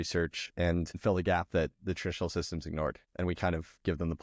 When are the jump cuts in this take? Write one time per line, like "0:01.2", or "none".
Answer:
none